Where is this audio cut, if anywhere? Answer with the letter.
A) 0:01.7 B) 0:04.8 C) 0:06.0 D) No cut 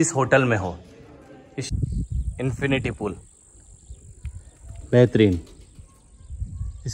A